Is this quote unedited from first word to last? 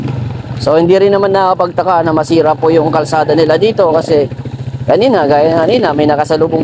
yes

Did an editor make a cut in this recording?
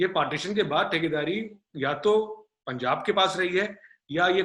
no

